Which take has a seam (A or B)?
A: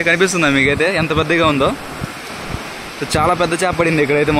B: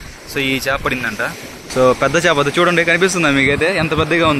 B